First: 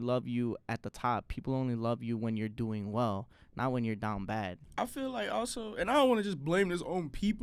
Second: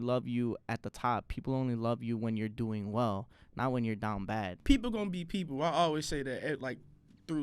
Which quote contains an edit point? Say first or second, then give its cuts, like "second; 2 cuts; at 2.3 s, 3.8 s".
second; 1 cut; at 4.5 s